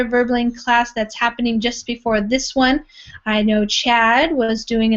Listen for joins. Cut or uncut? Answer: uncut